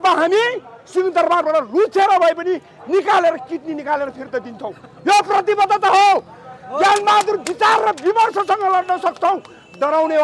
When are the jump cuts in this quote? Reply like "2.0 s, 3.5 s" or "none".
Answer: none